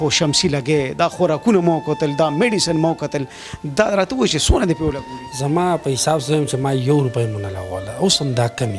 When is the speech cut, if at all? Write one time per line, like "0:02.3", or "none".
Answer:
none